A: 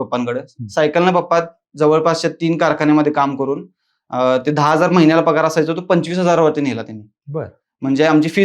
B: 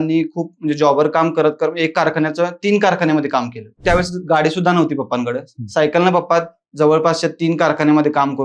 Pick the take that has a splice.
B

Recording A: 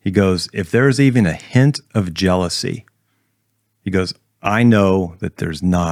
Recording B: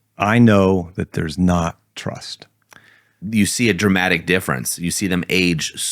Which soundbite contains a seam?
B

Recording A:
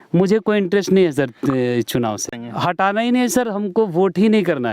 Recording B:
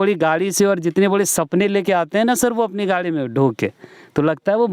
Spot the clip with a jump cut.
A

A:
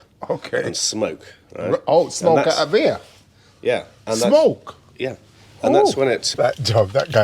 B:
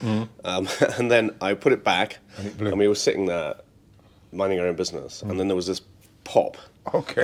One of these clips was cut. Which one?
A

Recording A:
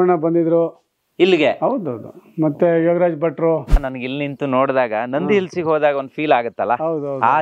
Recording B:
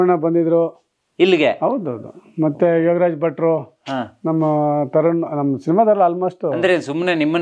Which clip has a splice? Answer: A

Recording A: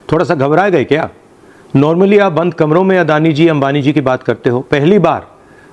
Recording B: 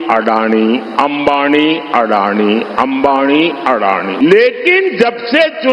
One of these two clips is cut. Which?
B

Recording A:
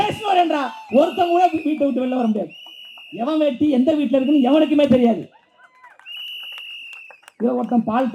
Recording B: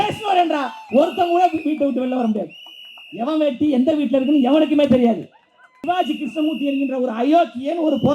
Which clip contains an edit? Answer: B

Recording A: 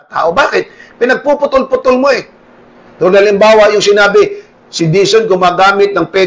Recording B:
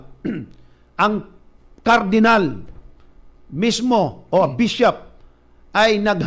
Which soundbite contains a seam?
B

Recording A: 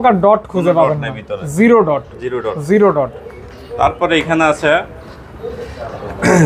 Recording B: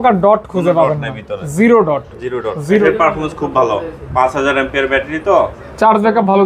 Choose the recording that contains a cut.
B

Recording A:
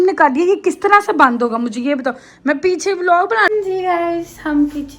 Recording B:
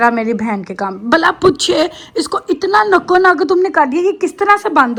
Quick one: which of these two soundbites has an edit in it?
A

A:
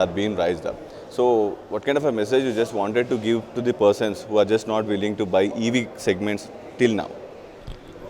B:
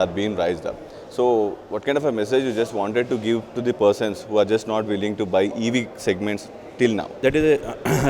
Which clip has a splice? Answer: B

